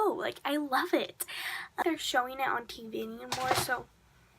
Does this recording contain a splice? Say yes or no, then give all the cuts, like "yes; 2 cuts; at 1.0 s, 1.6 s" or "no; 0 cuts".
yes; 1 cut; at 1.8 s